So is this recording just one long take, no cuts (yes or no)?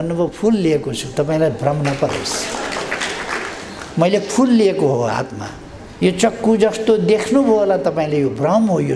yes